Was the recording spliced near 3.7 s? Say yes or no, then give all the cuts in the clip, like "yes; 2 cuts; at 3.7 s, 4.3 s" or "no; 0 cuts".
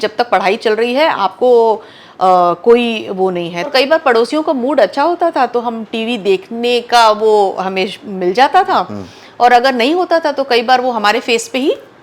yes; 1 cut; at 3.7 s